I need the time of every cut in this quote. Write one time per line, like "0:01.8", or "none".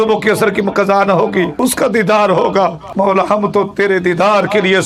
0:01.5
0:02.8